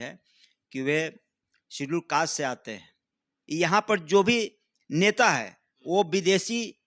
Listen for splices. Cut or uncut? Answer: cut